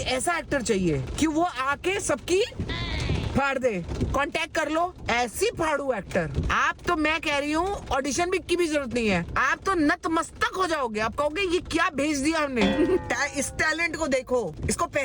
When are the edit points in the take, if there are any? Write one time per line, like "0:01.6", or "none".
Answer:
0:03.9
0:06.4
0:13.0